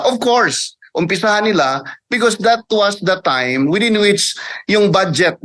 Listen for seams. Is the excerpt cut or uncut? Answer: uncut